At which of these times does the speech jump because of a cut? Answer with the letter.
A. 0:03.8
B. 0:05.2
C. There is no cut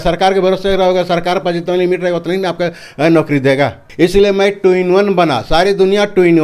A